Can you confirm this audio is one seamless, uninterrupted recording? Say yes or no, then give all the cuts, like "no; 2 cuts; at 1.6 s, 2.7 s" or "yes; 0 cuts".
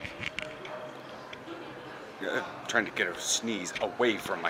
yes; 0 cuts